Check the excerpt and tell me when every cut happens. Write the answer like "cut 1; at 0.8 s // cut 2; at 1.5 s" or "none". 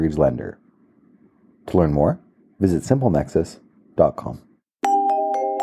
cut 1; at 4.5 s